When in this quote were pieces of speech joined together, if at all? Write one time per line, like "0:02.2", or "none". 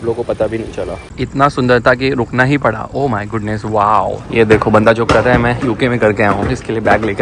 0:01.1
0:04.2